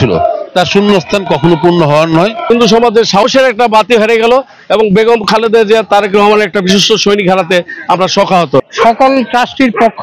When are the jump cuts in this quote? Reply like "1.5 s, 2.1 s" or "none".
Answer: 2.5 s, 8.7 s